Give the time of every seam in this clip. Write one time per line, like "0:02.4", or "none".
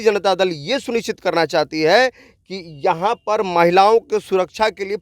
none